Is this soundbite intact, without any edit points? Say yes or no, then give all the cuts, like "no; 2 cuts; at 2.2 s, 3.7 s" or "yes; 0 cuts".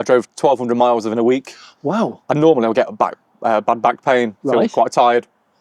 yes; 0 cuts